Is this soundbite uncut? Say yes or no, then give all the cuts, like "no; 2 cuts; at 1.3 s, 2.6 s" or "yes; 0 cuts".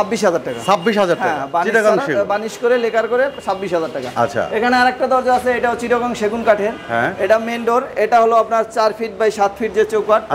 yes; 0 cuts